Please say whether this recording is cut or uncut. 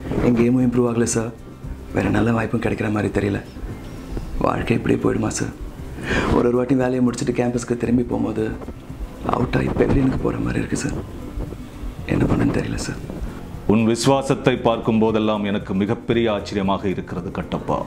cut